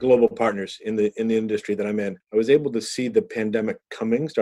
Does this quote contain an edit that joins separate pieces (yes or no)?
yes